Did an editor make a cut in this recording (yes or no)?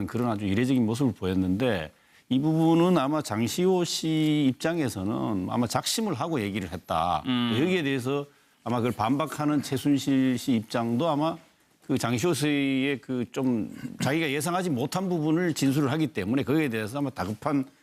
no